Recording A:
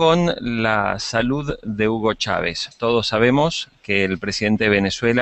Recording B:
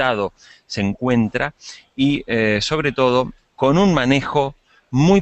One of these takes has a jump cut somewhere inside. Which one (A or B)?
B